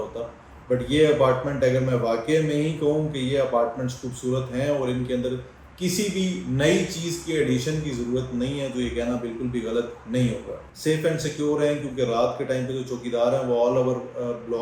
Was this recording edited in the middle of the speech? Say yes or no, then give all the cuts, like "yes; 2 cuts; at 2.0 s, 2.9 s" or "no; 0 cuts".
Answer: yes; 1 cut; at 10.4 s